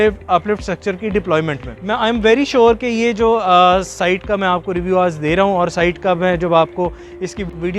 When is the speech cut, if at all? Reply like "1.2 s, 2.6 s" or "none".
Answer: 1.7 s